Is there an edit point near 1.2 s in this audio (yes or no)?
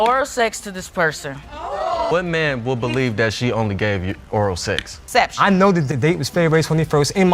no